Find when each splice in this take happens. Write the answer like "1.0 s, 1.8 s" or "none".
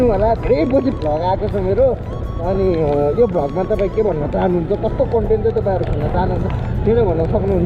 none